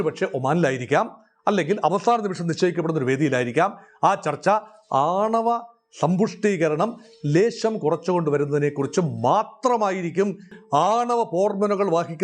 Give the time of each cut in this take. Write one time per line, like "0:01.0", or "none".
0:10.5